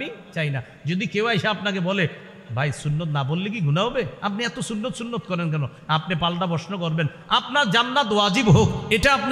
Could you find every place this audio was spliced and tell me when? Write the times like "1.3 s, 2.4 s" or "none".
none